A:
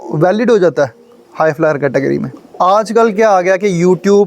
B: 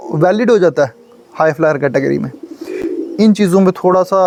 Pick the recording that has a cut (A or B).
A